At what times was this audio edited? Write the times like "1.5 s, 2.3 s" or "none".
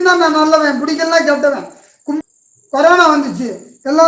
2.2 s